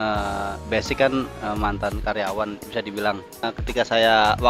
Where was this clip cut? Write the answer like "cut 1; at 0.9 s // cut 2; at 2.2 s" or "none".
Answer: cut 1; at 3.4 s